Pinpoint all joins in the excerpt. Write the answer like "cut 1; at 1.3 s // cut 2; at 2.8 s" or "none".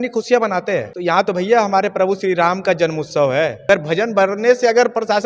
cut 1; at 0.9 s // cut 2; at 3.6 s